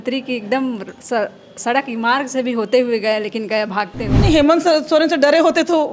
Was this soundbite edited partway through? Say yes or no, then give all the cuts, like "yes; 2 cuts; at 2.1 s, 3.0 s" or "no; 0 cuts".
yes; 1 cut; at 4.1 s